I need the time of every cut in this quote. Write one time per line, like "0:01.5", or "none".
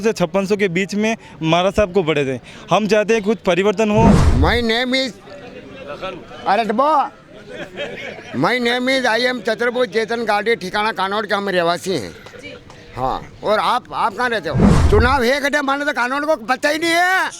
0:04.2
0:14.7